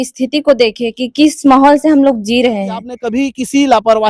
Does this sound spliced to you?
yes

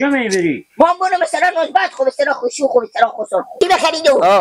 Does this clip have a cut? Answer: yes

